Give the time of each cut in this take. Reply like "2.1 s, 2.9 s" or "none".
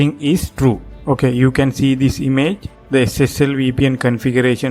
0.9 s, 2.7 s

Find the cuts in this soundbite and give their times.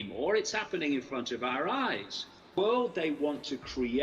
2.6 s

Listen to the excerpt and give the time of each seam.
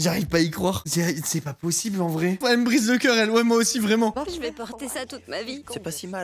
none

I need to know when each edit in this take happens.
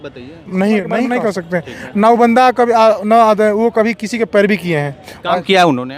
1.1 s

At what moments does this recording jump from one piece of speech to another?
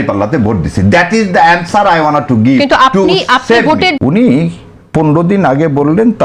4.0 s

